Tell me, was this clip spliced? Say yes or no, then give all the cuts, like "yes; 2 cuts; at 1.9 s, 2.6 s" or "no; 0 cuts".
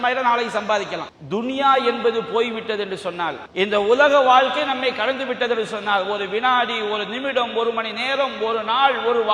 yes; 2 cuts; at 1.1 s, 3.4 s